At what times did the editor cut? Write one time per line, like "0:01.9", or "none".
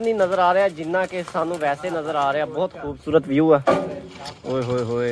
none